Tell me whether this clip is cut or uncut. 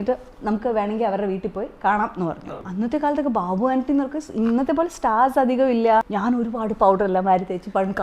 cut